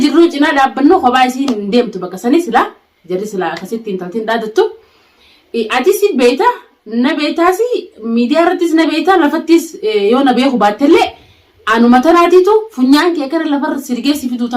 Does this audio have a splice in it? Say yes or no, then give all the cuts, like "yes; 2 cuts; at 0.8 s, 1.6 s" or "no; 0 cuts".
no; 0 cuts